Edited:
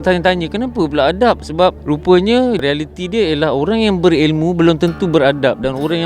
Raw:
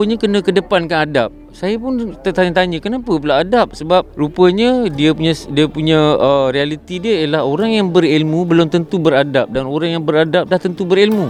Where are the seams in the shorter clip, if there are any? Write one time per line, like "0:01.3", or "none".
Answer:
0:02.6